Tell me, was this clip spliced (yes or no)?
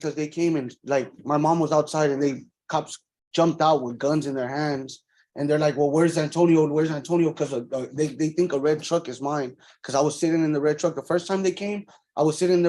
no